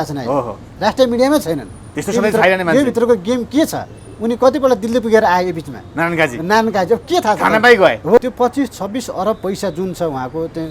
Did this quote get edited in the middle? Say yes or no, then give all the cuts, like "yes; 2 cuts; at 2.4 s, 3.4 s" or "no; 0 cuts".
yes; 1 cut; at 8.2 s